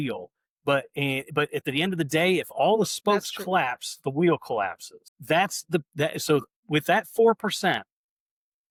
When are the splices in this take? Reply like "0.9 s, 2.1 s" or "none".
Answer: none